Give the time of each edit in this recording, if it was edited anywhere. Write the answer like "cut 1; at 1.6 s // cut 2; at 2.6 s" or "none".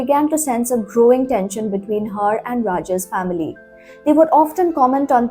none